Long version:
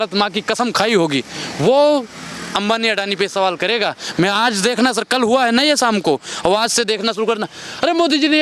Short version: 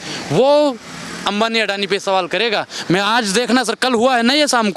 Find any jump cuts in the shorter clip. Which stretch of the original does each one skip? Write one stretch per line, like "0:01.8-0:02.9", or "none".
none

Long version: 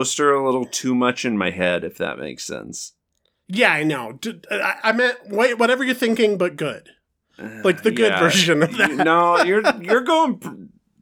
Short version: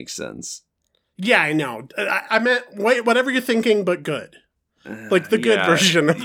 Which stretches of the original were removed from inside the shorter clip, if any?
0:04.1-0:04.4

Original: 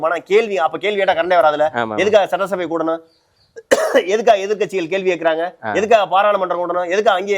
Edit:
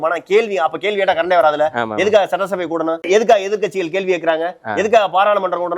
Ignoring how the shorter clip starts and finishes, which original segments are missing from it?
0:03.1-0:04.0

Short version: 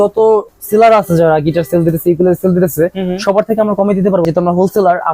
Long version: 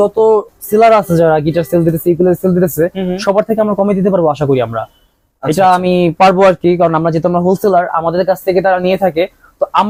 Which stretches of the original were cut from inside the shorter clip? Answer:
0:04.2-0:07.1

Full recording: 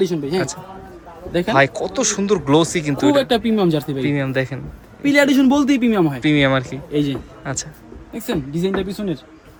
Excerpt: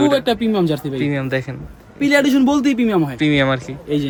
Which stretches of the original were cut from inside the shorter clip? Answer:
none

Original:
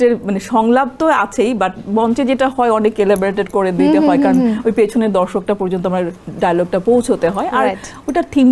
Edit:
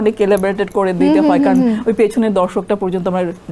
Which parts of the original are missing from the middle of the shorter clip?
none

